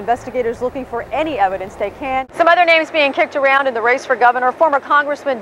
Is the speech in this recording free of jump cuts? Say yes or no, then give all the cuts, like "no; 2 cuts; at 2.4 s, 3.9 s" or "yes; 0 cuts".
no; 1 cut; at 2.3 s